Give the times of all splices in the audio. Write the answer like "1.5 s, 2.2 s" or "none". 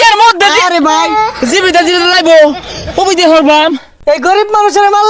3.9 s